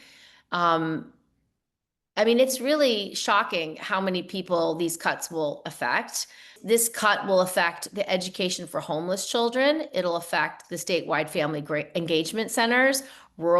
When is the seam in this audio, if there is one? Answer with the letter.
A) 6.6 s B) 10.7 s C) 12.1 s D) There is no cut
A